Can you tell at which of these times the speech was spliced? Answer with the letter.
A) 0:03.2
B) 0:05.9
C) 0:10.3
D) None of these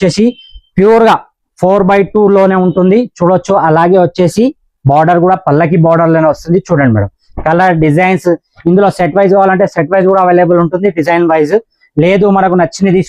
D